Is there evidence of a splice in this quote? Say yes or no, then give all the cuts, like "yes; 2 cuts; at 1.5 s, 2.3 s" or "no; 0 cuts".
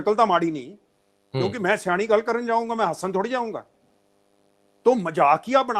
no; 0 cuts